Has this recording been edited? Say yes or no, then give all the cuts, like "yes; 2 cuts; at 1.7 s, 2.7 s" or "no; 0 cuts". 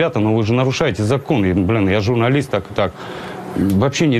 yes; 1 cut; at 3.0 s